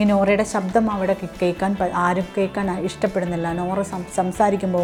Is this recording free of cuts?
yes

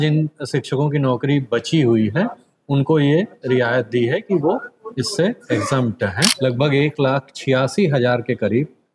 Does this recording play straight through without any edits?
no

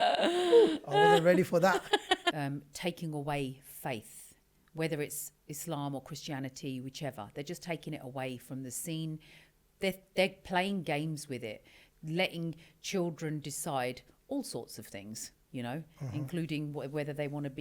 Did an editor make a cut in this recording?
yes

